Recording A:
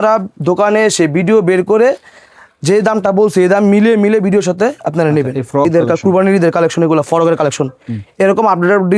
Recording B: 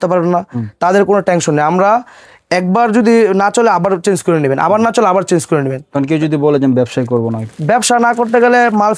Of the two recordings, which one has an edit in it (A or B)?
A